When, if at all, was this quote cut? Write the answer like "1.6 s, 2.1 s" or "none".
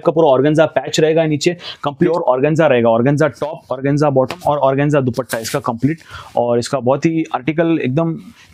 2.1 s